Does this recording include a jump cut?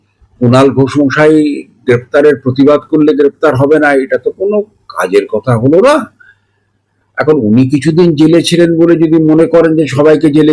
no; 0 cuts

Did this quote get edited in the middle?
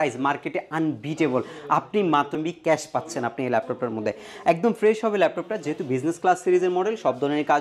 yes; 1 cut; at 2.4 s

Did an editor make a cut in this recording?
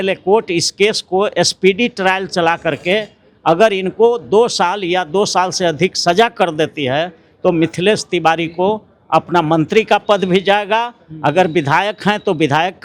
no; 0 cuts

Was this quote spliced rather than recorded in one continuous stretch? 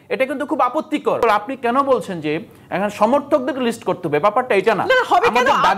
yes; 1 cut; at 1.2 s

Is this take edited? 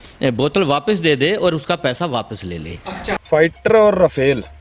yes; 1 cut; at 3.2 s

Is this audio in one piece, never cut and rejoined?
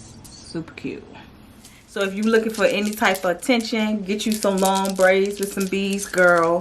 no; 1 cut; at 1.8 s

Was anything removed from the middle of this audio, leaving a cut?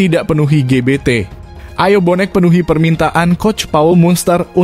no; 0 cuts

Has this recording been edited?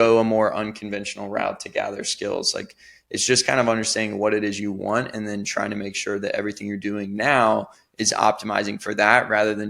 no; 0 cuts

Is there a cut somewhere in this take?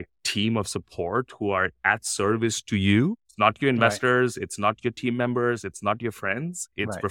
no; 0 cuts

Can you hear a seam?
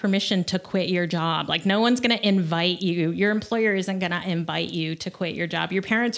no; 0 cuts

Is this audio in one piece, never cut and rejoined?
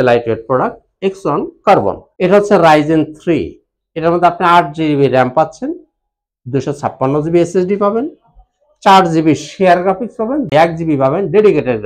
no; 1 cut; at 2.1 s

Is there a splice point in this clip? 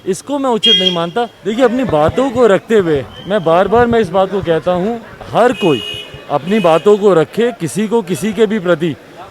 yes; 1 cut; at 1.4 s

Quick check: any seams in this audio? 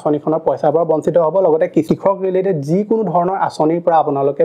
no; 0 cuts

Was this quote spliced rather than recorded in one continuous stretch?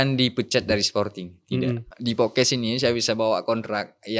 yes; 1 cut; at 1.9 s

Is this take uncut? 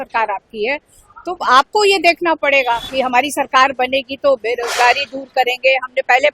no; 1 cut; at 2.9 s

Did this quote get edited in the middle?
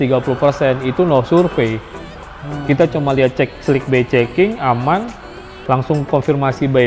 no; 0 cuts

